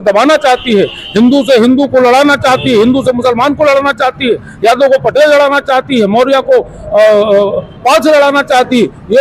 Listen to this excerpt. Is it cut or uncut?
uncut